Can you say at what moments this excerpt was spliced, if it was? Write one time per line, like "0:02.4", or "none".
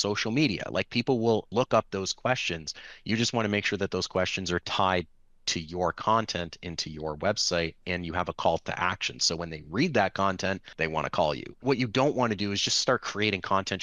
0:01.5
0:10.7
0:11.6